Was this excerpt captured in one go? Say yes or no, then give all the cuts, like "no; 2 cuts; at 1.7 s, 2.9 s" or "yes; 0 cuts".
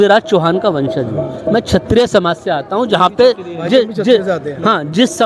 yes; 0 cuts